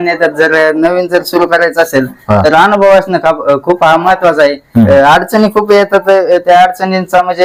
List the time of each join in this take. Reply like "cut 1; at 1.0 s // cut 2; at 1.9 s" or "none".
none